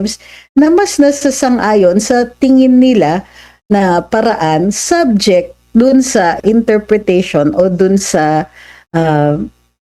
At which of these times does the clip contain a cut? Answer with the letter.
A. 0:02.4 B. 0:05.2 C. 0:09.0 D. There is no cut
D